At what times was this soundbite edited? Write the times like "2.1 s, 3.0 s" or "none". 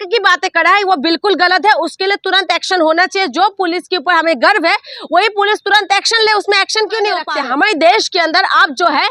7.3 s